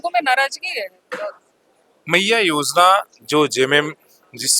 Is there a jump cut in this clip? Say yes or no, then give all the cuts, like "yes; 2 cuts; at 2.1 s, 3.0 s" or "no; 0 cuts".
no; 0 cuts